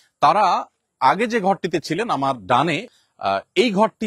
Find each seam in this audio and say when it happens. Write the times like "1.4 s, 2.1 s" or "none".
3.0 s